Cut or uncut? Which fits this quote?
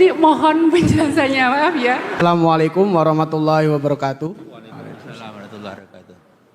cut